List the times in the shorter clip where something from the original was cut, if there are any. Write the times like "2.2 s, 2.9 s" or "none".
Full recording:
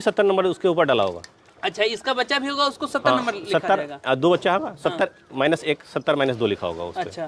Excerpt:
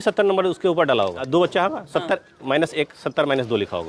1.2 s